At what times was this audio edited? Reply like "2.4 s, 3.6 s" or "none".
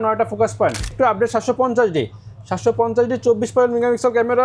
0.9 s

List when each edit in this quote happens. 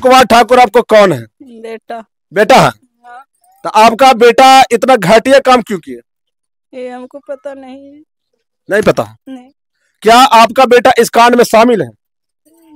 none

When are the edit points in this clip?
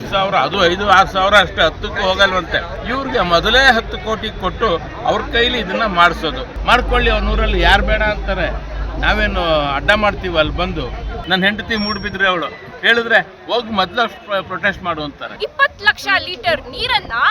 2.8 s, 6.5 s, 11.1 s, 15.3 s

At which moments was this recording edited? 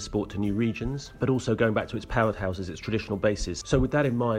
1.1 s, 3.5 s

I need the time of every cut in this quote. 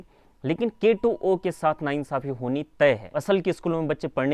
3.0 s

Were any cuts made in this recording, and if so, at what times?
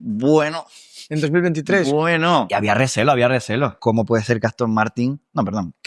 2.5 s, 3.8 s

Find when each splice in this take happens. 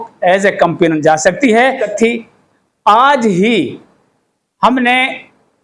1.9 s

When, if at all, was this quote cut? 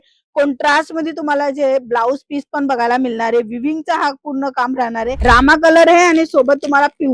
5.1 s

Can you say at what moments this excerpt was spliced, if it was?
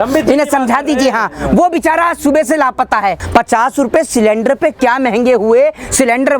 3.2 s

